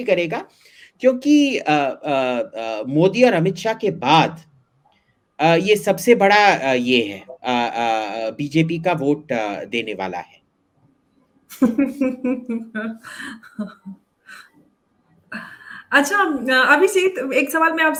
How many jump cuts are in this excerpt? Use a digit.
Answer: 0